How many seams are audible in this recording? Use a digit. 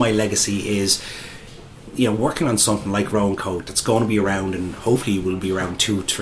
1